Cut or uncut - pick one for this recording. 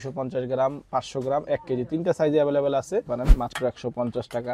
cut